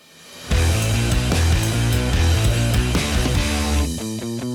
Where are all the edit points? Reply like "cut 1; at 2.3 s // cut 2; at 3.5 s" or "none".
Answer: none